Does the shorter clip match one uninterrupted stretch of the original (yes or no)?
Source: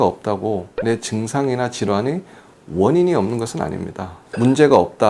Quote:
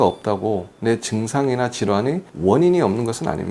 no